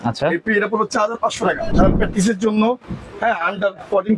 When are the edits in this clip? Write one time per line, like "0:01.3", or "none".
0:01.7